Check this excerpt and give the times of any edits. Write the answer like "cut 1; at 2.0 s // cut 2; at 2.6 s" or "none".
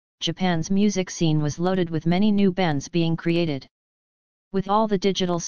none